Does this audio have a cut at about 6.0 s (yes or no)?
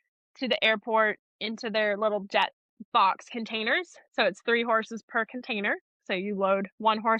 no